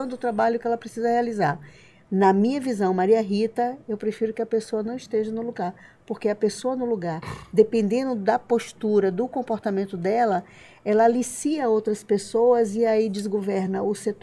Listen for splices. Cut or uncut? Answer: uncut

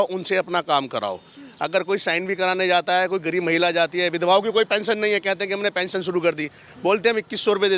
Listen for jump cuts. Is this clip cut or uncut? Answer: uncut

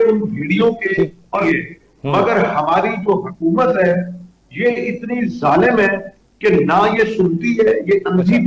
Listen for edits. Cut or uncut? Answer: cut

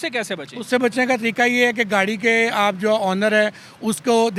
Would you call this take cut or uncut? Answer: uncut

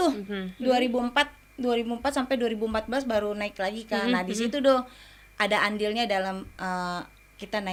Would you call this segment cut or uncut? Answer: uncut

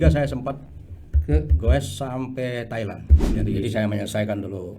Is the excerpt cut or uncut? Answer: cut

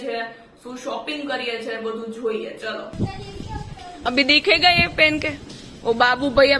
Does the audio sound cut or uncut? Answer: cut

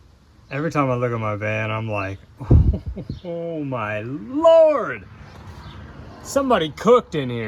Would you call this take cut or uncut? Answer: uncut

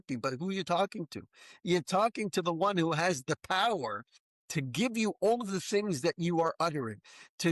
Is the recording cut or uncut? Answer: uncut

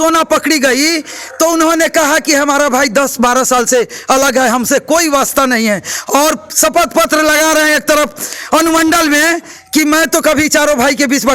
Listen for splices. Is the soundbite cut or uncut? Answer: uncut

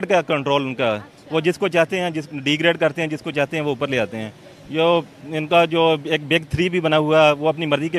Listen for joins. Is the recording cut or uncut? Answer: uncut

